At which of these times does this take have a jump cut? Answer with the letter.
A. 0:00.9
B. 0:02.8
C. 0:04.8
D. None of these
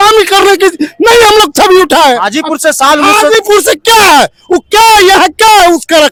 D